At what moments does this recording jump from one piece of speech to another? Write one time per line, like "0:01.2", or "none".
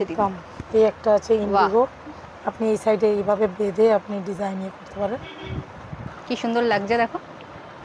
0:06.1